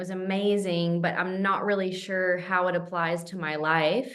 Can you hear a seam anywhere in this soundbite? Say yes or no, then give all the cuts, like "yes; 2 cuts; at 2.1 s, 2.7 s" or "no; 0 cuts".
no; 0 cuts